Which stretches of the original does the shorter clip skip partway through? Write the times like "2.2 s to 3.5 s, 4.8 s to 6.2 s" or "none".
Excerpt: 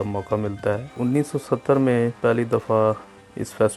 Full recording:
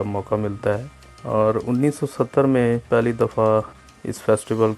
1.0 s to 1.6 s